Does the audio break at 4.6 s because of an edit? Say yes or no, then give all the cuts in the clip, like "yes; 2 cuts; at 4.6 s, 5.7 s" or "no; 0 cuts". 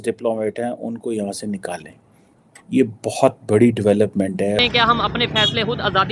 yes; 1 cut; at 4.6 s